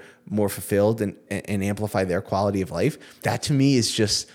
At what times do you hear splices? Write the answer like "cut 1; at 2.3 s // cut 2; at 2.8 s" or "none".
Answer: cut 1; at 3.2 s